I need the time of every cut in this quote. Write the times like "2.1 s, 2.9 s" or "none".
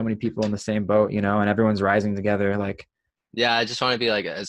none